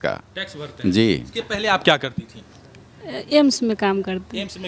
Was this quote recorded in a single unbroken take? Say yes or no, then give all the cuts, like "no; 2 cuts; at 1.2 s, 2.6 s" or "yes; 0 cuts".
no; 1 cut; at 1.3 s